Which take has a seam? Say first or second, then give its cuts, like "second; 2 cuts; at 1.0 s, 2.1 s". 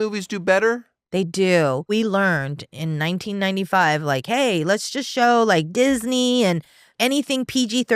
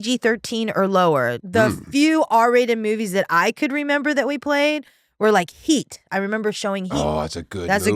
second; 1 cut; at 1.4 s